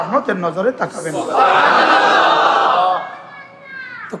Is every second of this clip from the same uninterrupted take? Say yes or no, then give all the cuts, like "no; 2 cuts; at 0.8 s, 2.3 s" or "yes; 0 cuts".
yes; 0 cuts